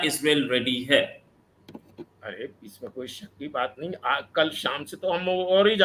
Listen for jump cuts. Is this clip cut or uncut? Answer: uncut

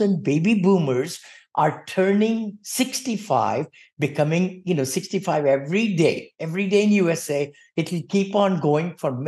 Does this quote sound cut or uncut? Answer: uncut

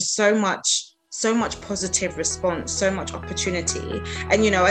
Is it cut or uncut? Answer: uncut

